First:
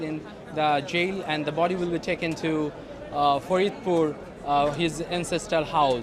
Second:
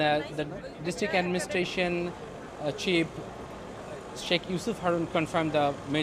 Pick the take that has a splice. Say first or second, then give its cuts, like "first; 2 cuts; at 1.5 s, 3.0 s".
first; 1 cut; at 2.7 s